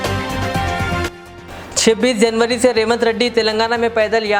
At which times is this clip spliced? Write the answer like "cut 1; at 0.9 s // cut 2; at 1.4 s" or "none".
none